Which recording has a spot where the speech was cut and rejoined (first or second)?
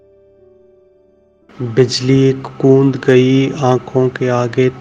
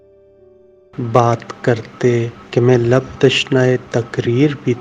first